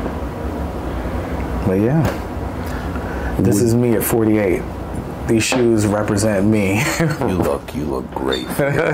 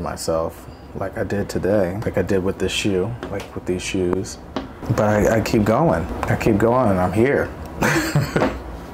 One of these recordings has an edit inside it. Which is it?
second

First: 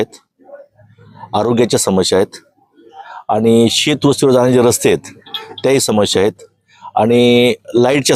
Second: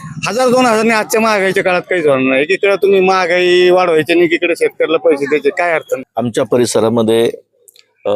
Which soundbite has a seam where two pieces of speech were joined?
second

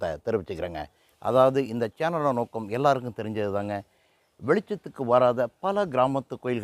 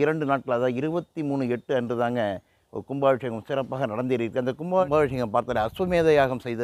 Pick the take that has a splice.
second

